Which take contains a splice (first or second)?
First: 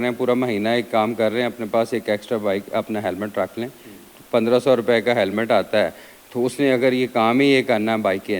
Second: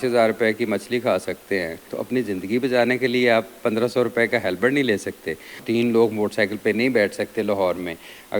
second